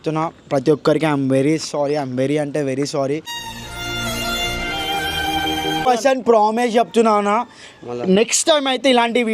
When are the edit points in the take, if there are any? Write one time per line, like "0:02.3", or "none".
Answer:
0:05.8